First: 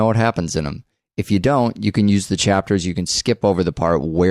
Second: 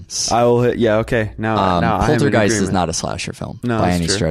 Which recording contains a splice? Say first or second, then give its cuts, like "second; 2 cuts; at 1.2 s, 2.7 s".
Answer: second; 1 cut; at 2.3 s